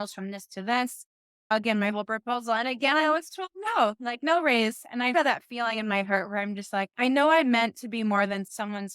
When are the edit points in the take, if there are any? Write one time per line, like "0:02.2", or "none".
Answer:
0:05.1